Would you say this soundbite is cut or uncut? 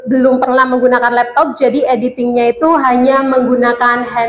uncut